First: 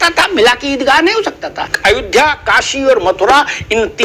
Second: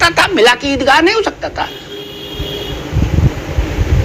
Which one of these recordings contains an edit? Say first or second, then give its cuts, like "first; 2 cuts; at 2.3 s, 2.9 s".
first; 1 cut; at 1.7 s